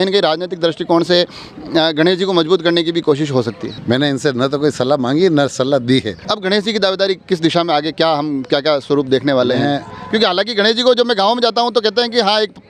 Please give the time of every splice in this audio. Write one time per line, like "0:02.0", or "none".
0:03.7
0:06.2